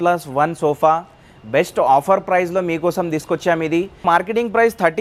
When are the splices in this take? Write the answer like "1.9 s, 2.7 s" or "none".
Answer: 4.0 s